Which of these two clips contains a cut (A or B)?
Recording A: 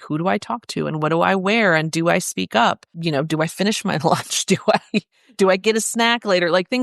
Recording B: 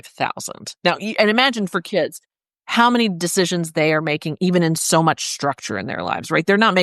A